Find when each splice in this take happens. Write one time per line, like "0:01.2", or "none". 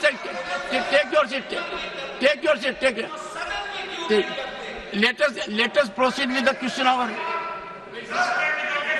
none

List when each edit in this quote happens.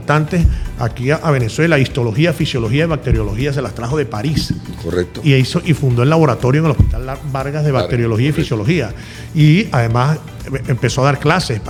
none

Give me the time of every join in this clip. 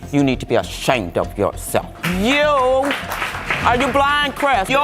none

